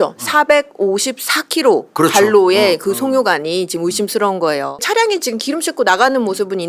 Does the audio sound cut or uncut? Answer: cut